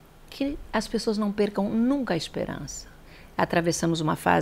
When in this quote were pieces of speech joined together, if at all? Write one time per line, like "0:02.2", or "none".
0:03.0